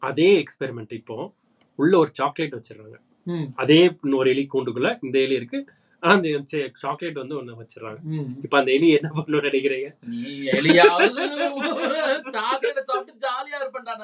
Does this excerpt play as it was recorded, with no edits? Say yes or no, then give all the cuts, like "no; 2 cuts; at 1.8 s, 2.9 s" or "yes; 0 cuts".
yes; 0 cuts